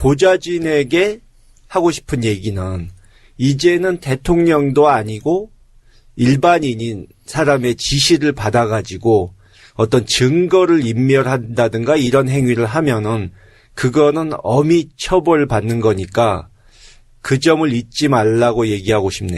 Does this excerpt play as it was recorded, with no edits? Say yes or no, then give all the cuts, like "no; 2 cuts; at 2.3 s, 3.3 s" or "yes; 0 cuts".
no; 1 cut; at 16.0 s